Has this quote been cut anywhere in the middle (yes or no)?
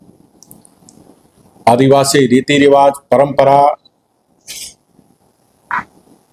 no